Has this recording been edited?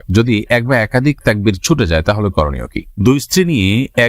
yes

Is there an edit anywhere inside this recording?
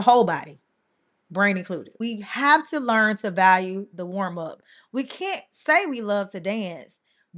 yes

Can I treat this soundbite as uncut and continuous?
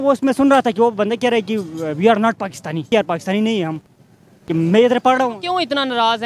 no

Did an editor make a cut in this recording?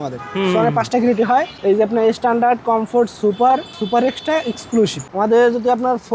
yes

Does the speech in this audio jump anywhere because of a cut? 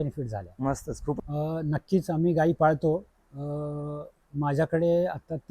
yes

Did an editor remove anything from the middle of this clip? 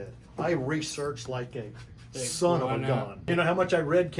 yes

